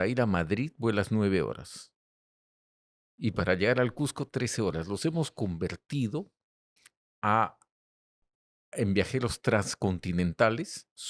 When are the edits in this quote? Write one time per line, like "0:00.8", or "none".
none